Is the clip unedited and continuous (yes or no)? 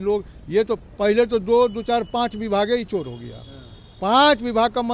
yes